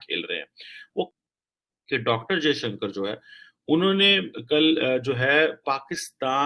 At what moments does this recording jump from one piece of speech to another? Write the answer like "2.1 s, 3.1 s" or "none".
1.2 s